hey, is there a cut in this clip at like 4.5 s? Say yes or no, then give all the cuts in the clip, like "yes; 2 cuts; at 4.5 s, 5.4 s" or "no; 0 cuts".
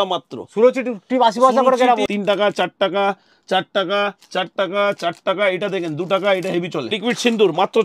no; 2 cuts; at 2.1 s, 6.9 s